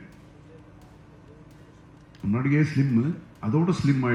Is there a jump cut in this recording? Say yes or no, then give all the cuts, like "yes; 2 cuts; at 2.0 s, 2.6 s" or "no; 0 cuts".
no; 0 cuts